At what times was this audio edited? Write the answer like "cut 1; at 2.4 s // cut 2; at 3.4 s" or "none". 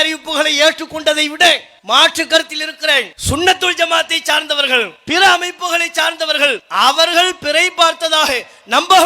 cut 1; at 1.7 s // cut 2; at 3.1 s // cut 3; at 5.0 s // cut 4; at 6.6 s